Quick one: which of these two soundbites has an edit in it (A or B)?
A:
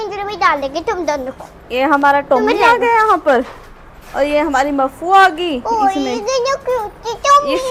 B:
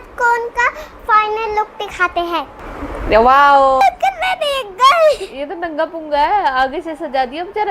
B